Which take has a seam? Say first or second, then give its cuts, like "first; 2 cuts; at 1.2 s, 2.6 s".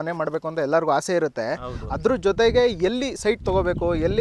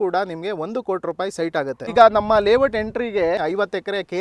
second; 2 cuts; at 1.9 s, 3.4 s